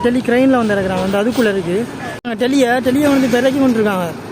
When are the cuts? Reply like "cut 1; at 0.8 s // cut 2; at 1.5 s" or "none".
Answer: cut 1; at 2.1 s